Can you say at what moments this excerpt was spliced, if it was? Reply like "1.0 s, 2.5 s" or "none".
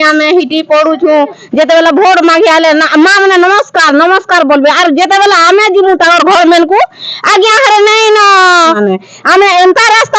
8.8 s